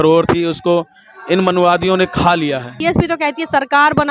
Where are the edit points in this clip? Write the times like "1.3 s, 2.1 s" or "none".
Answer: 2.7 s